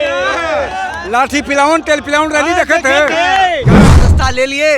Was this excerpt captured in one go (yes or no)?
no